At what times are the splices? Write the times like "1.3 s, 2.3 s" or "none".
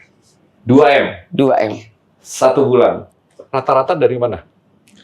3.1 s